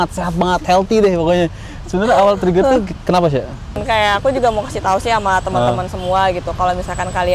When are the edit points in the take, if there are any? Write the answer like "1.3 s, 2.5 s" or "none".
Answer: 3.8 s